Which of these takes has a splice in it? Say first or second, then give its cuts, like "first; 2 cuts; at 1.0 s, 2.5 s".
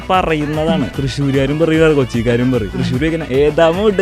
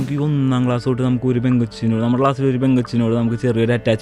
first; 2 cuts; at 1.0 s, 2.8 s